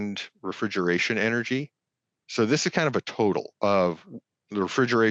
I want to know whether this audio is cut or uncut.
cut